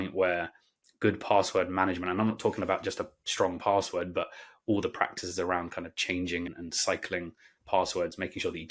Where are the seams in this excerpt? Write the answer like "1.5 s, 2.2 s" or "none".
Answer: 6.5 s